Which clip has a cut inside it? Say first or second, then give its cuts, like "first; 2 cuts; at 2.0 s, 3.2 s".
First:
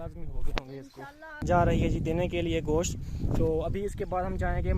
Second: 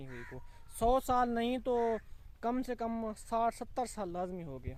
first; 1 cut; at 1.4 s